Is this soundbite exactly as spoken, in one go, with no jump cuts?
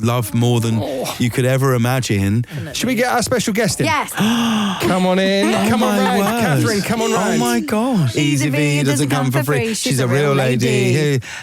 no; 3 cuts; at 2.6 s, 4.1 s, 8.1 s

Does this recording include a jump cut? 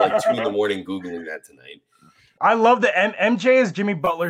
yes; 1 cut; at 2.2 s

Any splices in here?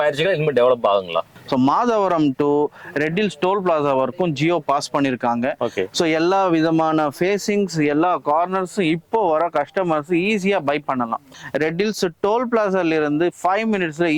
yes; 3 cuts; at 1.2 s, 5.8 s, 11.4 s

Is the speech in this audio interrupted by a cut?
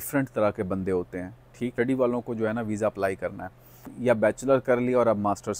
yes; 2 cuts; at 1.7 s, 3.9 s

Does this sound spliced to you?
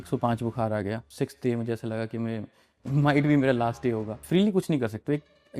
yes; 2 cuts; at 1.1 s, 4.1 s

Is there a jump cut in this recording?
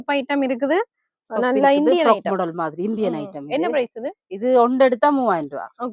no; 0 cuts

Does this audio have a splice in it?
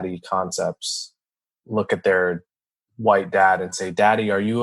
yes; 1 cut; at 1.3 s

